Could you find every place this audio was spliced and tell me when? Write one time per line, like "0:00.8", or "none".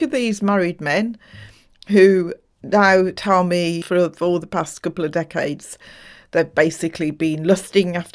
0:03.8